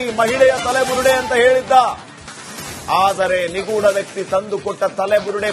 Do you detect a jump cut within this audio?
no; 0 cuts

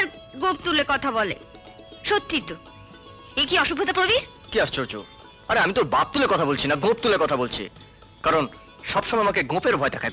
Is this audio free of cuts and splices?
yes; 0 cuts

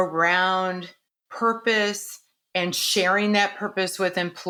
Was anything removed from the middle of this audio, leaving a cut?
no; 0 cuts

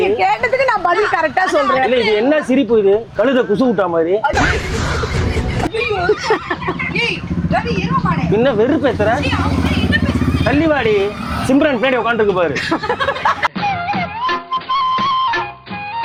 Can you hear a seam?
no; 0 cuts

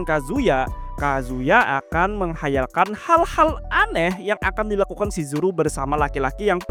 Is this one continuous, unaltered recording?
yes; 0 cuts

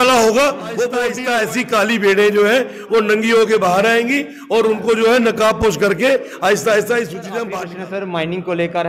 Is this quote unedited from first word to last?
no; 2 cuts; at 1.1 s, 7.5 s

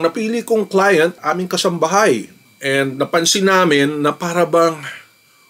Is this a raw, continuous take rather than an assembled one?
yes; 0 cuts

